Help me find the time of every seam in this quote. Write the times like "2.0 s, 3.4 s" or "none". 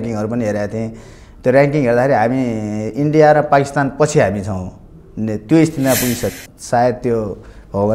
6.3 s